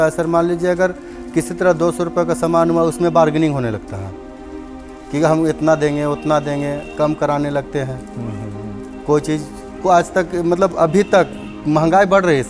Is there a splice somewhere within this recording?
no; 0 cuts

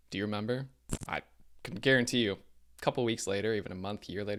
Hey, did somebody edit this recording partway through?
no; 0 cuts

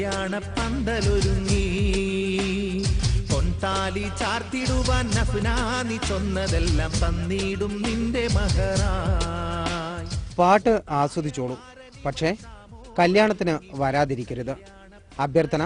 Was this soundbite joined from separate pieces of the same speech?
no; 0 cuts

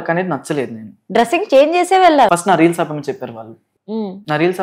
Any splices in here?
yes; 2 cuts; at 0.9 s, 2.3 s

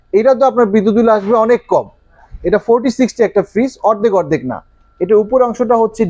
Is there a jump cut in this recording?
no; 0 cuts

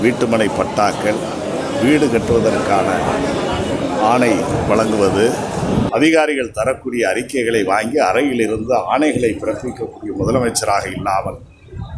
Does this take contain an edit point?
yes; 1 cut; at 5.9 s

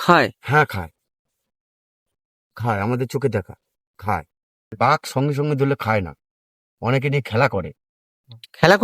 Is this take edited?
yes; 1 cut; at 4.8 s

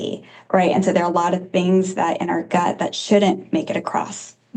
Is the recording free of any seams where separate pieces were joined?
yes; 0 cuts

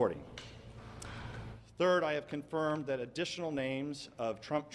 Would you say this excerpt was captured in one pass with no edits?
no; 1 cut; at 3.4 s

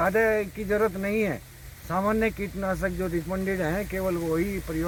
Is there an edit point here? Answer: no; 0 cuts

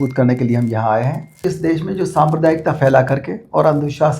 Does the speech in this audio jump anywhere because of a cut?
yes; 1 cut; at 1.4 s

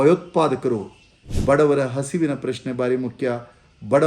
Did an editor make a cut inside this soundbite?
yes; 1 cut; at 1.2 s

